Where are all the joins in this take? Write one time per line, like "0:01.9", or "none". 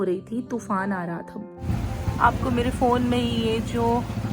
0:01.6